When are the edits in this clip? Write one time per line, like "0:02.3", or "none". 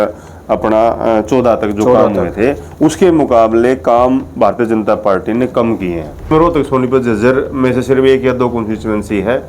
0:06.3